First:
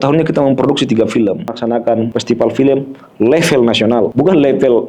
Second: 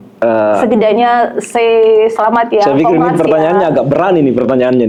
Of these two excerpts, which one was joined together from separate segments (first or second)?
first